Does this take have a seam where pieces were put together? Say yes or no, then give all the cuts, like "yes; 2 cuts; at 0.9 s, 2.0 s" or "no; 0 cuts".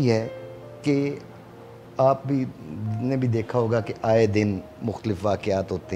no; 0 cuts